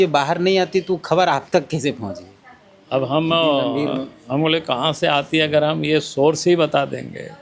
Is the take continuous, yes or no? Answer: yes